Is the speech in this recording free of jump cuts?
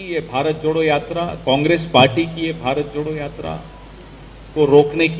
yes; 0 cuts

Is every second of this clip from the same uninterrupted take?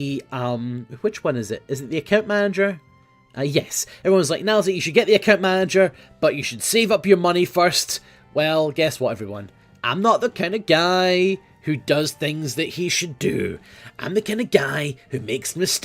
yes; 0 cuts

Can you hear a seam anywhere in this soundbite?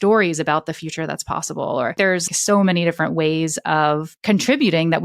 yes; 2 cuts; at 2.2 s, 4.1 s

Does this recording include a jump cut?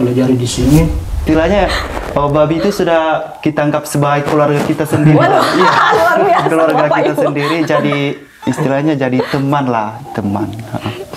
yes; 1 cut; at 1.2 s

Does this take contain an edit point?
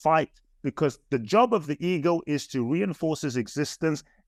no; 0 cuts

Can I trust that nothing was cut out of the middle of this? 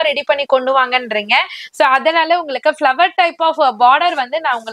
yes; 0 cuts

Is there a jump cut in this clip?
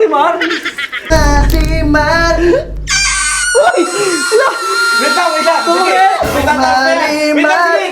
yes; 1 cut; at 1.0 s

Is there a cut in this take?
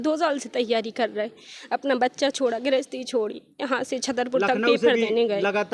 no; 0 cuts

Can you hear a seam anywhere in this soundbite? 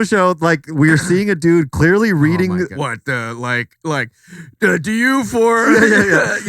yes; 1 cut; at 2.8 s

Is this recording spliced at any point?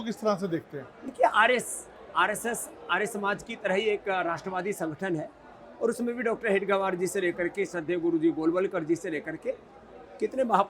no; 0 cuts

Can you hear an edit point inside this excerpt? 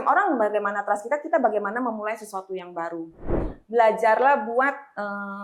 yes; 1 cut; at 3.4 s

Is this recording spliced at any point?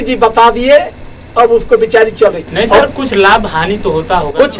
no; 0 cuts

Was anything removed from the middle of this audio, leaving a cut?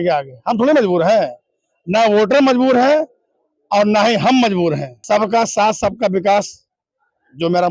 yes; 1 cut; at 4.9 s

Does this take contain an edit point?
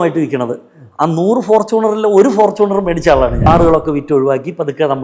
yes; 1 cut; at 3.5 s

